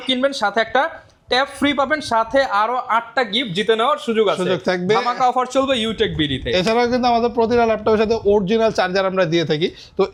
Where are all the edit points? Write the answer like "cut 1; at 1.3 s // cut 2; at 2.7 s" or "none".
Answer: none